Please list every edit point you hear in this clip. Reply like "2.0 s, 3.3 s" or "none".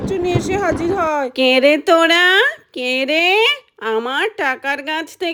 none